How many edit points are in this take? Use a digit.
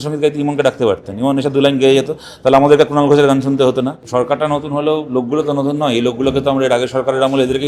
1